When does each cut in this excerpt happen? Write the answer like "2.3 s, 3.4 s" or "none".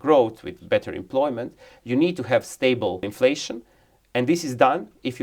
3.1 s